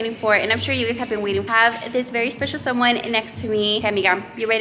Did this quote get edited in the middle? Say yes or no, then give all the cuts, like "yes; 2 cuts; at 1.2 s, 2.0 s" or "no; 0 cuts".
yes; 2 cuts; at 1.5 s, 3.8 s